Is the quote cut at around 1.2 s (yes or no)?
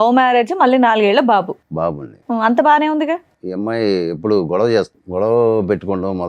no